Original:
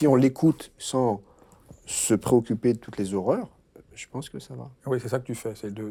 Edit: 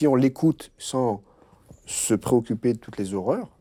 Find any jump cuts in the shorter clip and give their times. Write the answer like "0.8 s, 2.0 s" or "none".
none

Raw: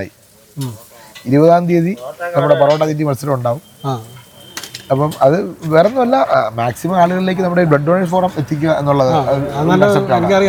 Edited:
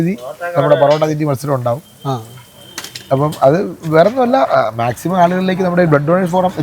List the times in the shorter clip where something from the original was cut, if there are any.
none

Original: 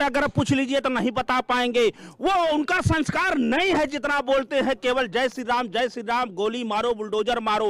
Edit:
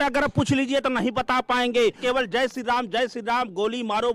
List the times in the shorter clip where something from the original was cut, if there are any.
2.0 s

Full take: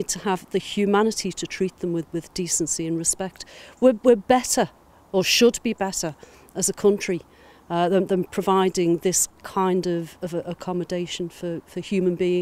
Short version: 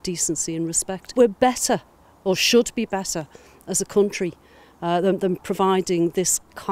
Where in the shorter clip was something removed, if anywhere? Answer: 1.1 s

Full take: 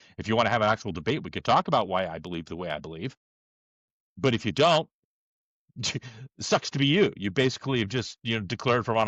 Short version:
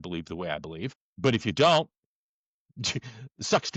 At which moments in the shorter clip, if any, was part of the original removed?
1.0 s

